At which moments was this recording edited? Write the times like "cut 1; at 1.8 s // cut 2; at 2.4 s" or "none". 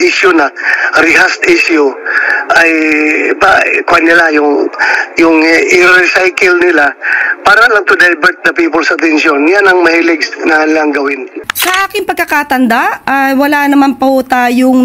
cut 1; at 11.3 s